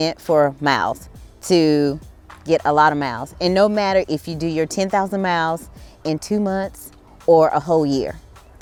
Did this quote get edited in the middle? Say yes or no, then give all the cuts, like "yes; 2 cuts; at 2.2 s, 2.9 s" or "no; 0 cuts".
no; 0 cuts